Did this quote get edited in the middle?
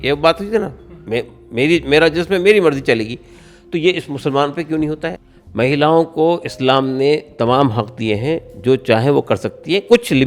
yes; 1 cut; at 5.1 s

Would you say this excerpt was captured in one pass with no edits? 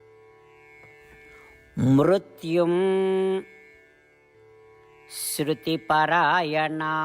no; 1 cut; at 1.4 s

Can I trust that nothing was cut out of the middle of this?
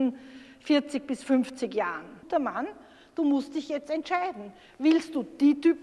no; 1 cut; at 2.3 s

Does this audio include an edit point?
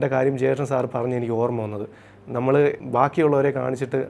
no; 0 cuts

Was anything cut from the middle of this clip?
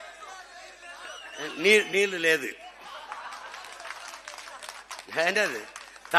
no; 0 cuts

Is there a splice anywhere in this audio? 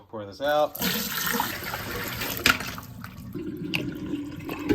yes; 1 cut; at 1.5 s

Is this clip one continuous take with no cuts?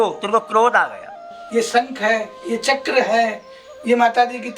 no; 1 cut; at 1.3 s

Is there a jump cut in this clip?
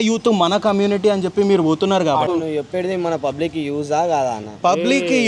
yes; 1 cut; at 2.3 s

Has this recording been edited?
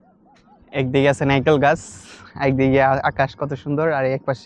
no; 0 cuts

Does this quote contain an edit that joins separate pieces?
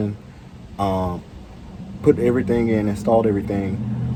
no; 0 cuts

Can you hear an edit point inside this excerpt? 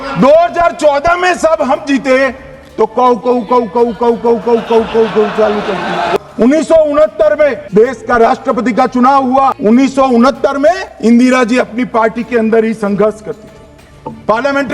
yes; 4 cuts; at 6.2 s, 7.7 s, 9.6 s, 10.9 s

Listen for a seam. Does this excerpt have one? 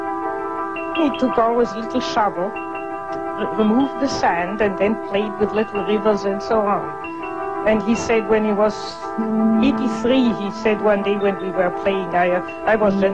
yes; 1 cut; at 7.3 s

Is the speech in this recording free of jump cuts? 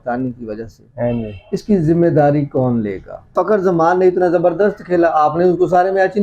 no; 1 cut; at 3.3 s

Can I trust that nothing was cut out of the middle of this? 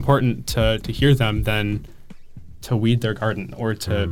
yes; 0 cuts

